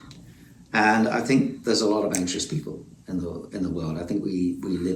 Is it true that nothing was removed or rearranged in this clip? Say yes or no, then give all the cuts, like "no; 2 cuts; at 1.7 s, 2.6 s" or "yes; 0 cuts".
yes; 0 cuts